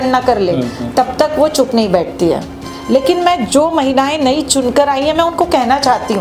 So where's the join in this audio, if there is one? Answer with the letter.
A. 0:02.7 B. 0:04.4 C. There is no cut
A